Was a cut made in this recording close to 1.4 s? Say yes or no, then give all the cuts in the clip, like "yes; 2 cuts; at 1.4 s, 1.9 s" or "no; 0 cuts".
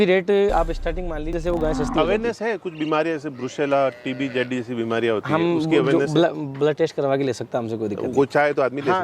yes; 1 cut; at 1.4 s